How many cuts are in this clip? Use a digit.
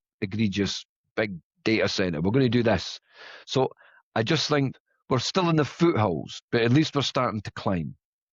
2